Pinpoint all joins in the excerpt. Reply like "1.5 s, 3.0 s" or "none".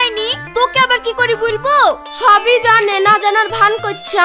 none

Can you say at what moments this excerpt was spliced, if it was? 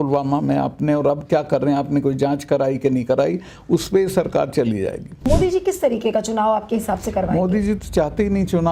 5.1 s

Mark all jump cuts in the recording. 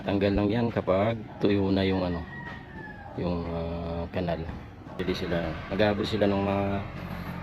5.0 s

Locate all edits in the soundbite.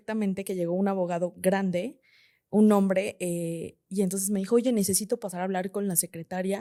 none

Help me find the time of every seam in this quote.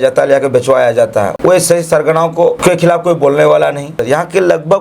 1.3 s, 2.6 s, 4.0 s

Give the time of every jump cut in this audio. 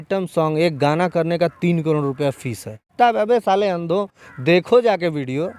2.8 s

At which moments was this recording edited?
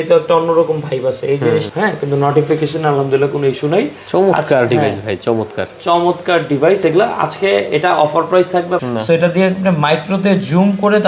1.7 s, 8.8 s

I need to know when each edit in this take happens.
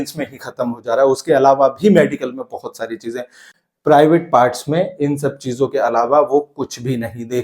3.5 s

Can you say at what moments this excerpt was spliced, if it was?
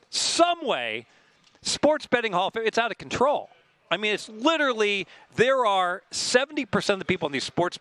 none

